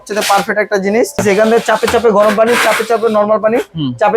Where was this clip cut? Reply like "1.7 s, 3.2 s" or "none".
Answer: 1.2 s